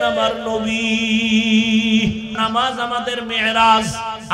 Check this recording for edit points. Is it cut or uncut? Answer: cut